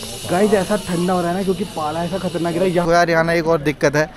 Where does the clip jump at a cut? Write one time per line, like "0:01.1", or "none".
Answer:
0:02.8